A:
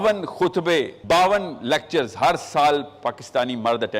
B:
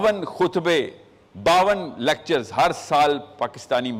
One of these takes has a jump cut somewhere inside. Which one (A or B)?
A